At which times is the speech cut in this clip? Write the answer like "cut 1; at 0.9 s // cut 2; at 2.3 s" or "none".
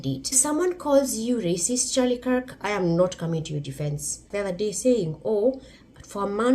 cut 1; at 4.2 s